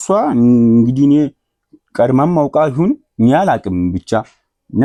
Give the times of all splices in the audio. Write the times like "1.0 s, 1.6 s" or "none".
none